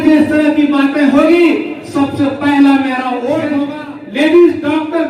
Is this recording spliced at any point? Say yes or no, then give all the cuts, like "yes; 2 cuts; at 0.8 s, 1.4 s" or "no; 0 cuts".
yes; 1 cut; at 3.6 s